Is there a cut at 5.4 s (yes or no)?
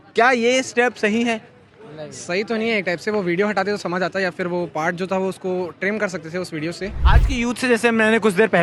no